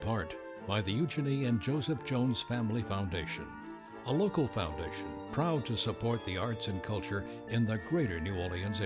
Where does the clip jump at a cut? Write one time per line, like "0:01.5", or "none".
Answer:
none